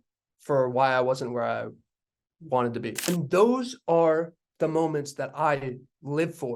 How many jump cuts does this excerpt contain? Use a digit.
1